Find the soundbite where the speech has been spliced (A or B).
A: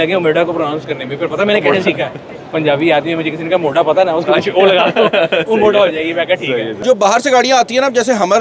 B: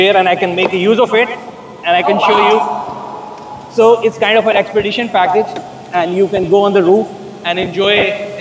A